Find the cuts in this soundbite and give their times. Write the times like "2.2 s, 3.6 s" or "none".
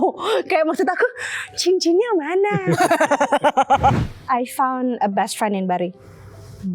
4.0 s